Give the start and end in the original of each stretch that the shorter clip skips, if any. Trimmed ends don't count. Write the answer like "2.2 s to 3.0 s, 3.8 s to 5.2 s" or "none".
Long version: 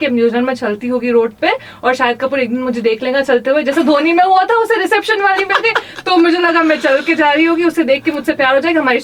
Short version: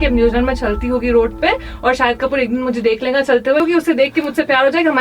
3.6 s to 7.5 s